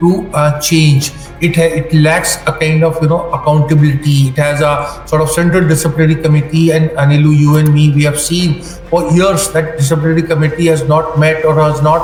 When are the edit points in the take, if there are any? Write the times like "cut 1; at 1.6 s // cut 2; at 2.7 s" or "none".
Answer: none